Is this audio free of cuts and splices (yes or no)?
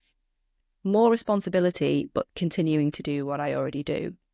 yes